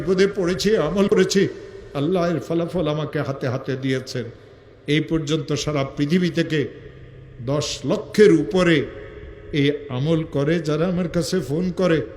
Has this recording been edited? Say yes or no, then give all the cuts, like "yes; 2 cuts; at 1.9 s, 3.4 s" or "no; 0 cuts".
yes; 1 cut; at 1.1 s